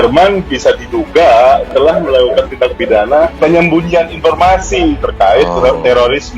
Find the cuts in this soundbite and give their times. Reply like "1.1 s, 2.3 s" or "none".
3.3 s